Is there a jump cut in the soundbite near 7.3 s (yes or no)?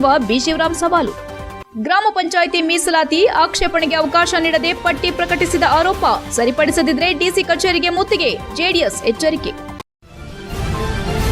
no